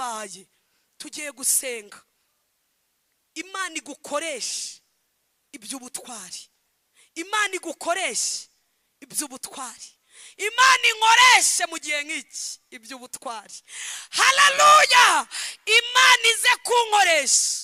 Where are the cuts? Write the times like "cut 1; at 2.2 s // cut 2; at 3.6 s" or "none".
none